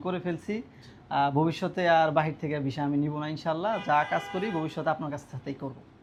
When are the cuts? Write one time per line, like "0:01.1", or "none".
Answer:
none